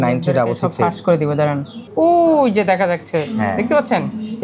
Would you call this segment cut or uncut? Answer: cut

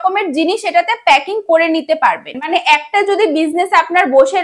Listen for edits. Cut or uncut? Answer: cut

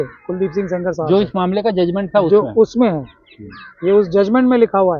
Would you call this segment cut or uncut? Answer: uncut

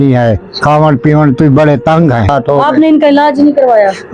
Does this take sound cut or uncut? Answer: cut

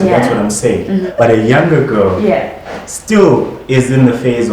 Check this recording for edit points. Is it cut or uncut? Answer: cut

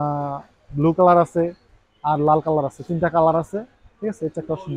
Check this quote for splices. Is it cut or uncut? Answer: uncut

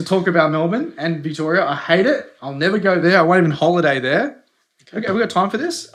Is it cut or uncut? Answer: uncut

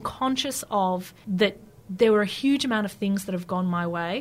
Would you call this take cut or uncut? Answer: cut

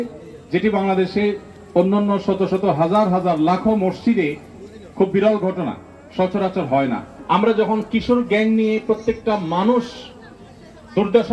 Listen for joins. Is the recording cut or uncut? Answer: cut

